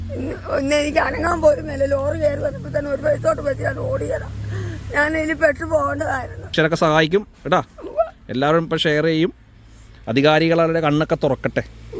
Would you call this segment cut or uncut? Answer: cut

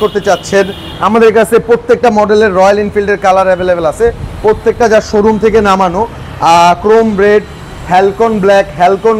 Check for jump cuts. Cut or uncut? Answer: uncut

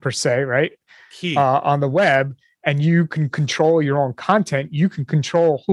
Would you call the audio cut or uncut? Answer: uncut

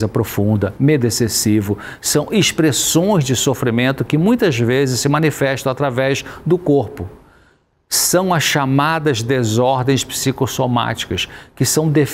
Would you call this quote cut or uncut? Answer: uncut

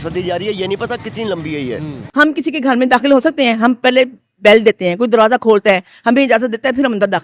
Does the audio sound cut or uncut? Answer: cut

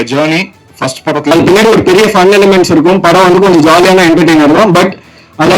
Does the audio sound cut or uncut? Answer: cut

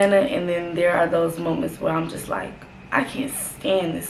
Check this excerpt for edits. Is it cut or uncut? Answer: uncut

